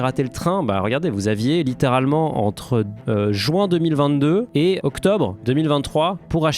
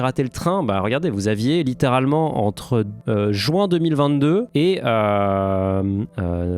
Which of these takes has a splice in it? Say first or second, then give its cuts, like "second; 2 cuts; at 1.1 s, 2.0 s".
first; 1 cut; at 4.8 s